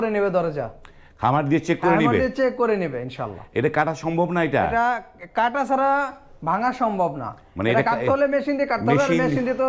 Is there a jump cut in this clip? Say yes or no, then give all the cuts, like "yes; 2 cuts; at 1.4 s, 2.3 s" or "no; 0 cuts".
no; 0 cuts